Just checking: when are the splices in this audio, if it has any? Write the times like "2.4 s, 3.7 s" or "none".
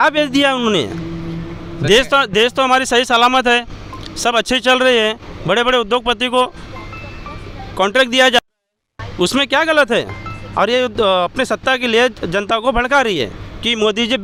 none